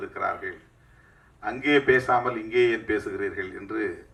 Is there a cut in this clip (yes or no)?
no